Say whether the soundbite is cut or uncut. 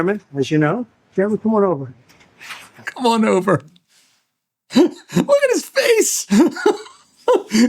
cut